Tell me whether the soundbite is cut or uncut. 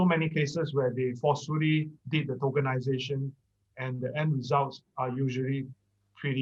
uncut